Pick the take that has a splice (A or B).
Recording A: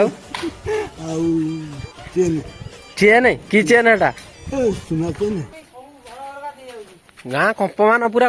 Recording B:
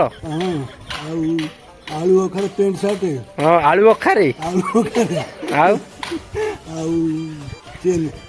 A